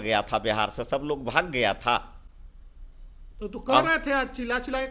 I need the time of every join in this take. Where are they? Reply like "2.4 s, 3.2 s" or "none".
none